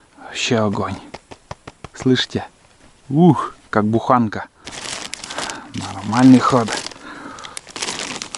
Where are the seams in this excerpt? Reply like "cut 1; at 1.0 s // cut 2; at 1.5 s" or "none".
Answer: none